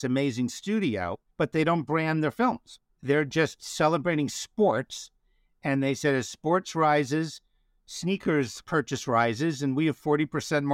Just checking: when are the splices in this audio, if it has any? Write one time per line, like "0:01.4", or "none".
0:01.2
0:03.1
0:08.6